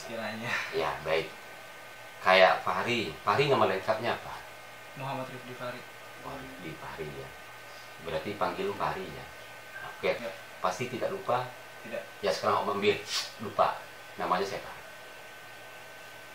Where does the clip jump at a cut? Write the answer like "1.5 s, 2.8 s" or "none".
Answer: 10.2 s

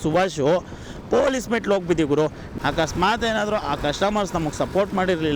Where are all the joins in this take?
2.4 s

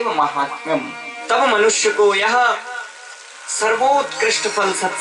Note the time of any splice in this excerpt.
1.1 s

